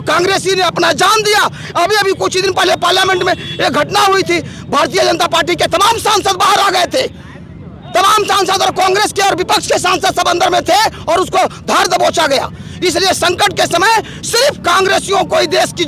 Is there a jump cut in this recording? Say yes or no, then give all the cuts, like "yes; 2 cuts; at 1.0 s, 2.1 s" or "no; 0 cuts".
no; 0 cuts